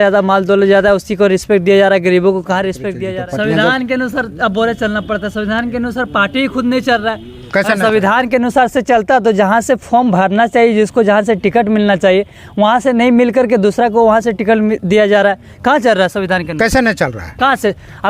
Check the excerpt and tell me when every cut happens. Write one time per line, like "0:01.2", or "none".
0:02.9